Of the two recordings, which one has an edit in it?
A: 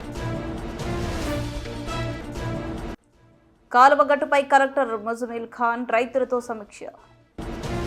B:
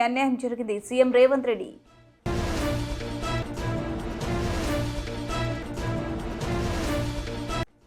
A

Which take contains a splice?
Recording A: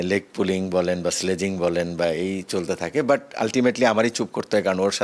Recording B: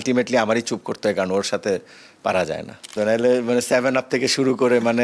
B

